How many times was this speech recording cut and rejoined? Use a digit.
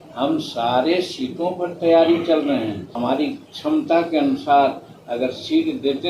1